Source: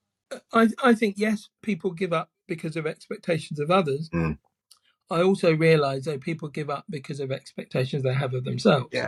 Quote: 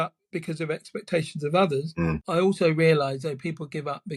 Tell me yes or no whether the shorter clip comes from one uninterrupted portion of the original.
no